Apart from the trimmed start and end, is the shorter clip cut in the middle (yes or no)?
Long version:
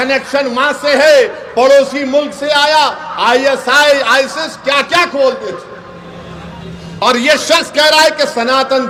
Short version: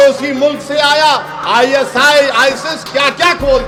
no